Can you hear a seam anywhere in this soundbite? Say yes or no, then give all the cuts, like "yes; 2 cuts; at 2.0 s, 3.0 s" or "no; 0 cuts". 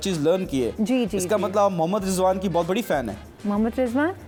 no; 0 cuts